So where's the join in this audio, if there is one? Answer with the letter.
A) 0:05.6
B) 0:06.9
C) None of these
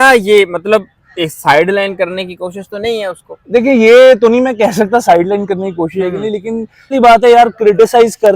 B